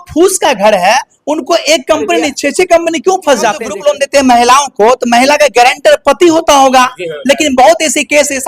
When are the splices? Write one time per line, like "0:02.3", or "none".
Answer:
0:03.6